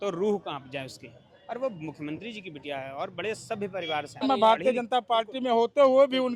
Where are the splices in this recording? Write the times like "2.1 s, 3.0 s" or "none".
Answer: 4.2 s